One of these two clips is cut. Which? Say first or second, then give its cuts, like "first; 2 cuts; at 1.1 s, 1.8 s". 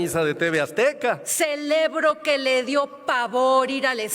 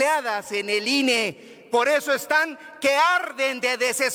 first; 1 cut; at 1.3 s